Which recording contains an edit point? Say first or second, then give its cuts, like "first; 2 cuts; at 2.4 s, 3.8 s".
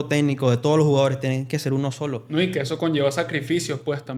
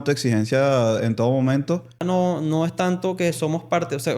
second; 1 cut; at 2.0 s